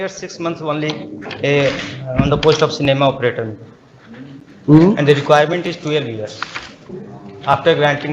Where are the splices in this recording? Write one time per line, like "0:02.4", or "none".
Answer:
0:07.0